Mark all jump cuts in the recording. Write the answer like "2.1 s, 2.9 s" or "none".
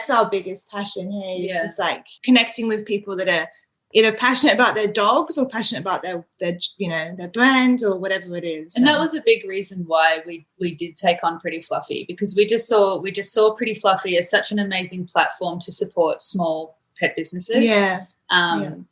2.1 s